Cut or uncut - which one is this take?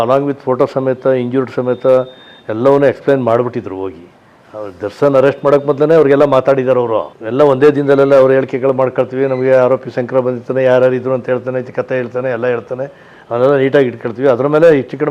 cut